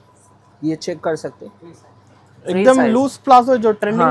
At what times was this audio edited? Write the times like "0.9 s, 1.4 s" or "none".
none